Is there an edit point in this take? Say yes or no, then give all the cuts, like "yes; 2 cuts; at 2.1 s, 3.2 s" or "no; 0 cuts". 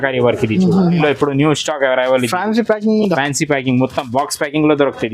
yes; 1 cut; at 1.0 s